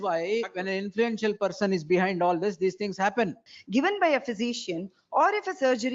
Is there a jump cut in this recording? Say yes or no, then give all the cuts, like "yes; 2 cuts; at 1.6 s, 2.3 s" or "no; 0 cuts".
yes; 1 cut; at 3.5 s